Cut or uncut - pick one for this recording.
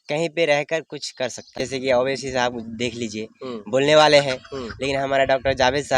cut